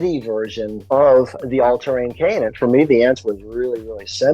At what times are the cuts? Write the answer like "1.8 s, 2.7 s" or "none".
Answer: 2.5 s

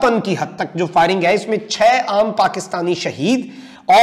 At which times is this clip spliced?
none

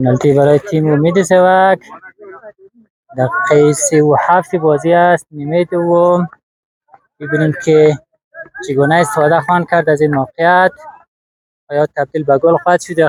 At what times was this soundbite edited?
none

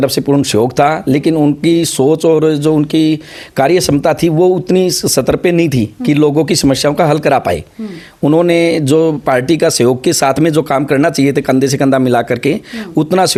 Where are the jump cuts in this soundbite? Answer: none

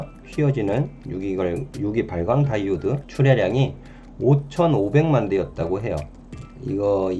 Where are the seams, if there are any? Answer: 3.1 s

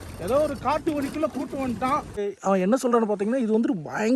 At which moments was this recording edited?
2.2 s

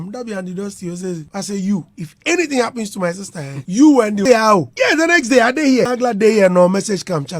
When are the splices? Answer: 4.2 s, 5.9 s

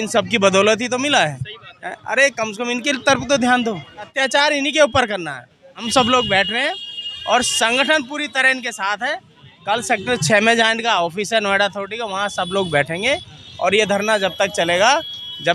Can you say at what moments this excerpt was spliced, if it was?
4.0 s, 5.8 s

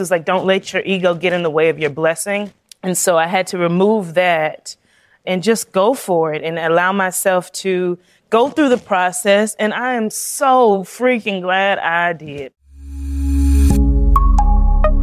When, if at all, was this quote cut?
12.5 s

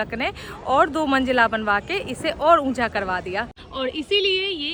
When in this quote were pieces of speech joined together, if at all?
none

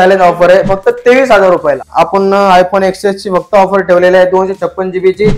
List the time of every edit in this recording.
1.9 s

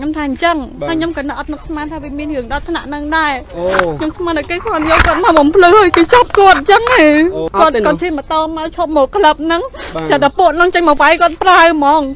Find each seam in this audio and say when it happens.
7.4 s

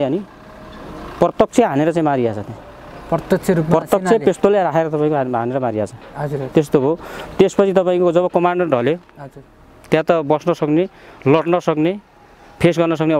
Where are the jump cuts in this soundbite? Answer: none

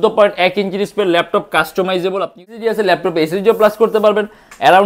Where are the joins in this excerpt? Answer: 2.5 s

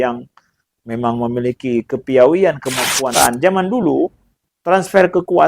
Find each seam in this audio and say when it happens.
3.1 s

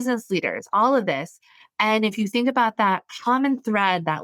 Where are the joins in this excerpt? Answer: none

